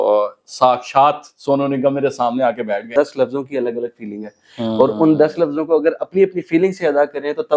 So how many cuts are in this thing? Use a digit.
1